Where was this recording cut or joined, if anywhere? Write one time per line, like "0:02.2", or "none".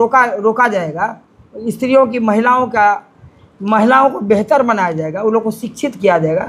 none